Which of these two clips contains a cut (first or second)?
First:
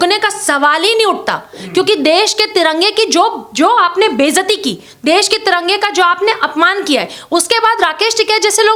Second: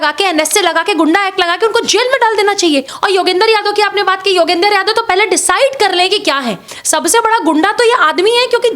second